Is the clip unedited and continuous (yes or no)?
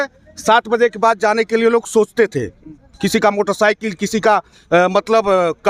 yes